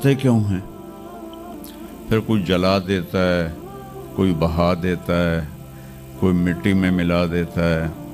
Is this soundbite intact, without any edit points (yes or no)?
yes